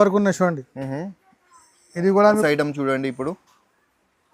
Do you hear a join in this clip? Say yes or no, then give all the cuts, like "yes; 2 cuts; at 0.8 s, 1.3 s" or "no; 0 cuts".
yes; 1 cut; at 2.4 s